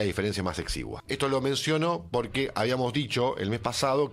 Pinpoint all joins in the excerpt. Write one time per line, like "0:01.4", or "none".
0:00.9